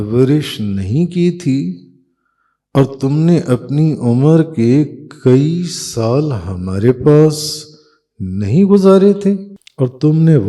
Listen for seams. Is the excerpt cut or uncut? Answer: cut